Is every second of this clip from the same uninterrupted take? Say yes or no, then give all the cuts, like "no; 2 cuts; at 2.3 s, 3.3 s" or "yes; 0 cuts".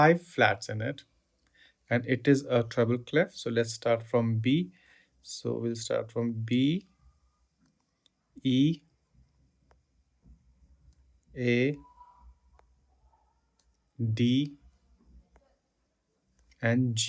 yes; 0 cuts